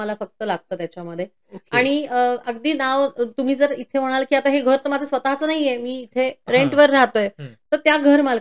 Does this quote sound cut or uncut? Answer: uncut